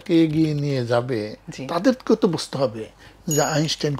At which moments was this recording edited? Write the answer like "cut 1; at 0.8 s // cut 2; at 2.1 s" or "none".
none